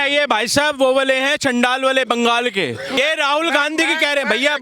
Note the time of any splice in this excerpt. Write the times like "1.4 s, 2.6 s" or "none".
3.0 s